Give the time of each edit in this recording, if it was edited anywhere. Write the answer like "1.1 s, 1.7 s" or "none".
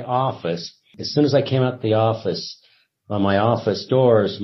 1.0 s